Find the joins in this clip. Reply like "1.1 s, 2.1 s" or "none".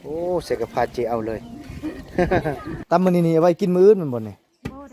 2.7 s